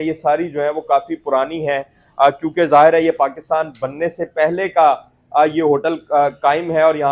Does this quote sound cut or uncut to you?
uncut